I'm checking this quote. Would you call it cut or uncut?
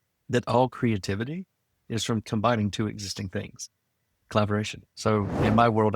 cut